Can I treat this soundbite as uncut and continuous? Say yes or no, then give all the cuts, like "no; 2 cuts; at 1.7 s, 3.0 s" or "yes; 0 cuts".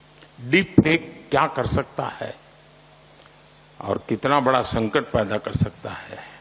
yes; 0 cuts